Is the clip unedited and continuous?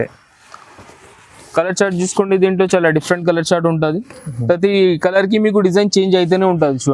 yes; 0 cuts

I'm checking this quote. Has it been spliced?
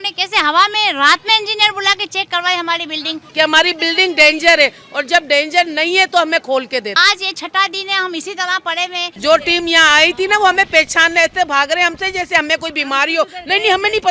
yes; 3 cuts; at 3.2 s, 6.9 s, 9.1 s

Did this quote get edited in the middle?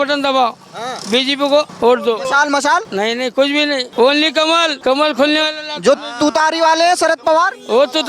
yes; 4 cuts; at 1.7 s, 2.9 s, 3.9 s, 4.8 s

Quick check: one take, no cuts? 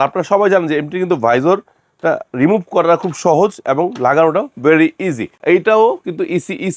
no; 1 cut; at 5.3 s

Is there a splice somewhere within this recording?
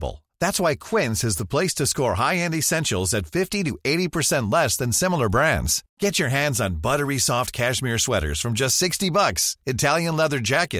no; 0 cuts

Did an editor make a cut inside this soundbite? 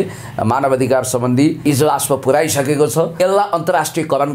yes; 2 cuts; at 1.7 s, 3.1 s

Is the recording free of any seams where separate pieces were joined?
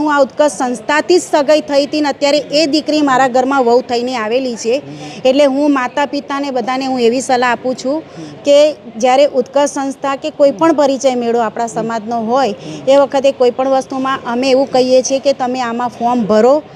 yes; 0 cuts

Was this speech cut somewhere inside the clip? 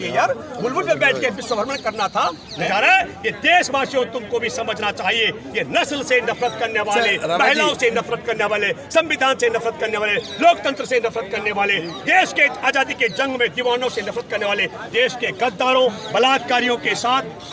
yes; 1 cut; at 2.7 s

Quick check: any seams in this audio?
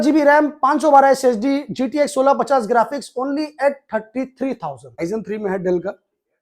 yes; 1 cut; at 5.0 s

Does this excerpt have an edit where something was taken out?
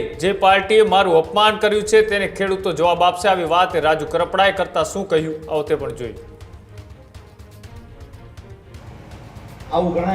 no; 0 cuts

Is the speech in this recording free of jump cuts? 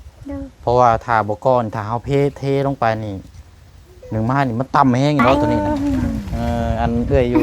no; 1 cut; at 5.3 s

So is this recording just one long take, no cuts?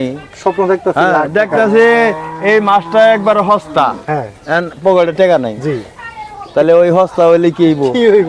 yes; 0 cuts

